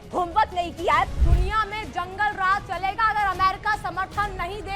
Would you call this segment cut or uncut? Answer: cut